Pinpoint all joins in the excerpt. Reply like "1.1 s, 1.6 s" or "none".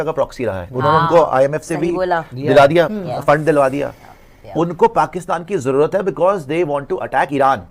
none